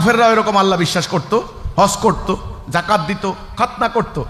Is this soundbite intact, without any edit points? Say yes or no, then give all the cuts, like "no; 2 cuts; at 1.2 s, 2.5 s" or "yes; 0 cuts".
yes; 0 cuts